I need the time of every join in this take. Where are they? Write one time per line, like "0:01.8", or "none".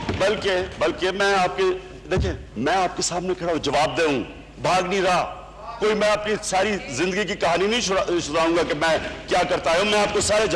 none